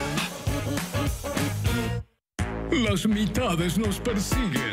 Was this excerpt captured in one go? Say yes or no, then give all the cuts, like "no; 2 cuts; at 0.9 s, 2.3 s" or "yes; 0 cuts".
yes; 0 cuts